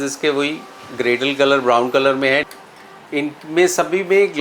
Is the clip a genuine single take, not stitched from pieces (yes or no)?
no